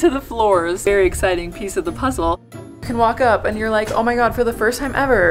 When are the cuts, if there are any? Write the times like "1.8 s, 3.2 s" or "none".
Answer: 2.4 s